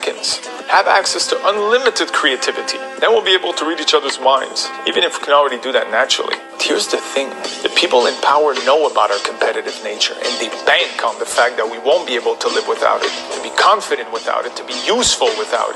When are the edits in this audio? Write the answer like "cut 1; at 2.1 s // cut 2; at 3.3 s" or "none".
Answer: cut 1; at 1.1 s